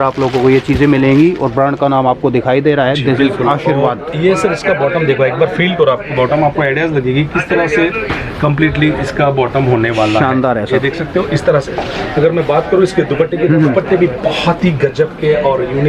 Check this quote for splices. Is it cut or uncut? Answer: uncut